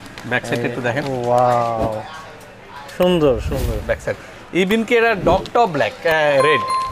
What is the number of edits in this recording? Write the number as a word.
zero